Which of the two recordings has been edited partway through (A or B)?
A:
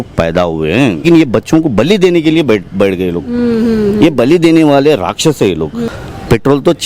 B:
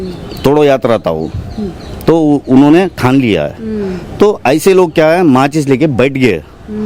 A